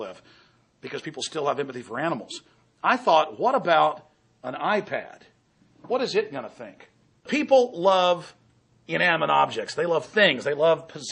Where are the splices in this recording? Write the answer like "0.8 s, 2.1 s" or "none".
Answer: none